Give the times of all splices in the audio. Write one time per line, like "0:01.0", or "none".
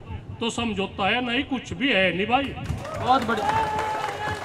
none